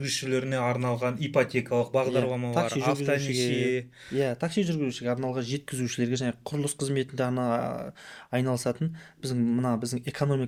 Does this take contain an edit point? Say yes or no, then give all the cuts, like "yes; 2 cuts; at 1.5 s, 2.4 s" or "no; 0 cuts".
no; 0 cuts